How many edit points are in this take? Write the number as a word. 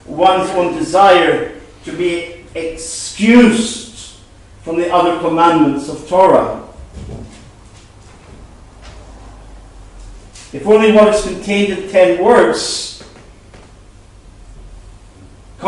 one